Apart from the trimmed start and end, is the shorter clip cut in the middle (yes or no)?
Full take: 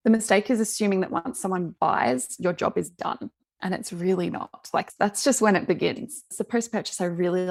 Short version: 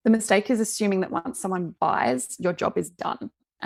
no